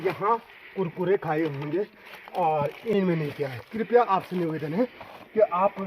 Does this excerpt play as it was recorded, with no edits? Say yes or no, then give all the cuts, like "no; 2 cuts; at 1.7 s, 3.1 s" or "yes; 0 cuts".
no; 1 cut; at 2.9 s